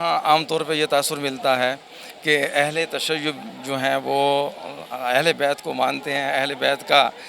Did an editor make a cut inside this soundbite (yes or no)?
no